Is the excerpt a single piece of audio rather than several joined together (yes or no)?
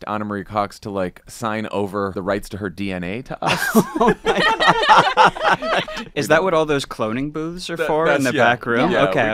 no